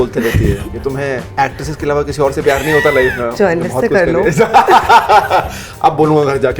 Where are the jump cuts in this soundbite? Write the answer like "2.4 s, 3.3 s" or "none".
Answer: 1.3 s, 3.3 s